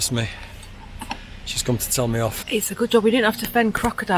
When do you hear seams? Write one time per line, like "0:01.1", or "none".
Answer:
0:02.4